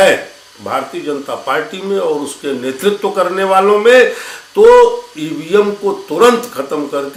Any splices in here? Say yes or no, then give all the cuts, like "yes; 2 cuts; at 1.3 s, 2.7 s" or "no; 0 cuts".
no; 0 cuts